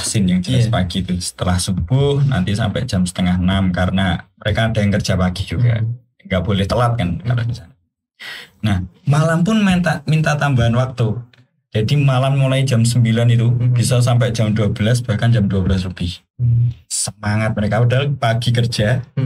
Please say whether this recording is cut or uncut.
uncut